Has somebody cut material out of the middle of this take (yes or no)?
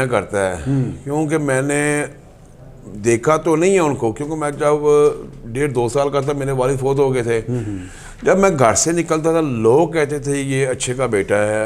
no